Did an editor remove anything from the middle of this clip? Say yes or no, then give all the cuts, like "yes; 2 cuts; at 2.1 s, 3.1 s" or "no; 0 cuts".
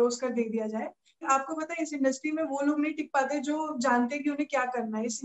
yes; 1 cut; at 1.2 s